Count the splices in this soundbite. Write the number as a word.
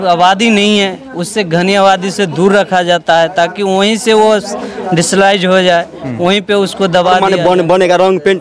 one